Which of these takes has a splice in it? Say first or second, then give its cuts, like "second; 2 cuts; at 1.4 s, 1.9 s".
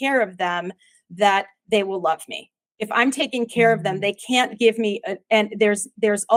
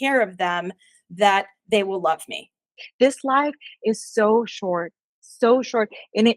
second; 1 cut; at 2.8 s